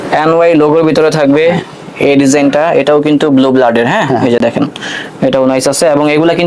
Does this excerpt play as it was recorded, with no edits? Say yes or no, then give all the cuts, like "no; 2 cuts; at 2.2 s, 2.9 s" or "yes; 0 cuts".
yes; 0 cuts